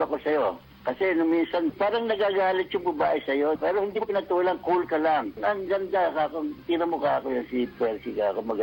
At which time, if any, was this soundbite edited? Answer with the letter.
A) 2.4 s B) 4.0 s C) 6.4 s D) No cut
B